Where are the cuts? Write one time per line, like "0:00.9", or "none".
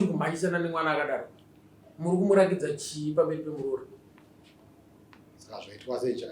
none